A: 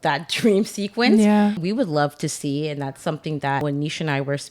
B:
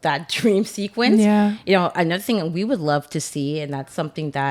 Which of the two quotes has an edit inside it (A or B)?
A